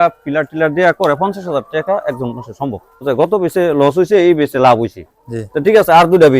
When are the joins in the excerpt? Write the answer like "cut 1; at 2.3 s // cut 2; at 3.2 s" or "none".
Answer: cut 1; at 3.0 s